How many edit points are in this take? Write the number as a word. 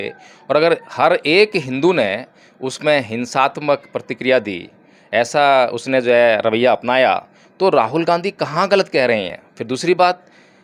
zero